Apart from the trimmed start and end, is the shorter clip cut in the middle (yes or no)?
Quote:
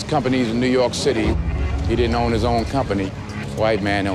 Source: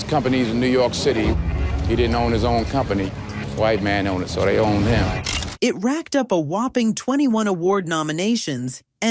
no